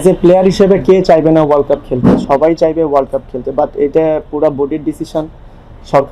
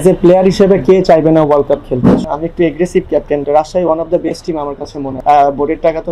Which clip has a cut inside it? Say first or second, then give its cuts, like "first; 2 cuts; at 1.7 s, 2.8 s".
second; 3 cuts; at 2.2 s, 3.4 s, 5.1 s